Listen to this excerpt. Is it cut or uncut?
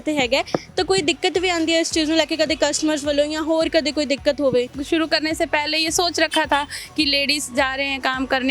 cut